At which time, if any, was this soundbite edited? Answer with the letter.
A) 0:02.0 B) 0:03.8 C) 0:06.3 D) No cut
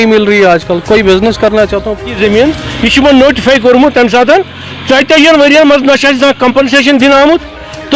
A